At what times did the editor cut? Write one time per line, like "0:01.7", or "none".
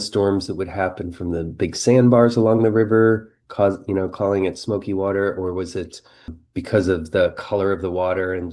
0:06.4